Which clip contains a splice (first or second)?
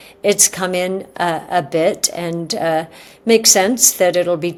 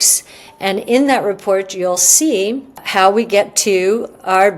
second